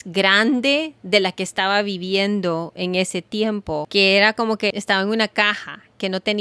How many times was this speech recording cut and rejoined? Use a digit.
2